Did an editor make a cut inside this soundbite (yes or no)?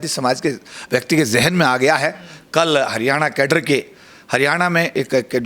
no